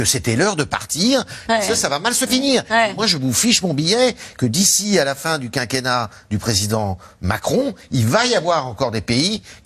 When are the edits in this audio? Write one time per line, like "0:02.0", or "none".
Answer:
none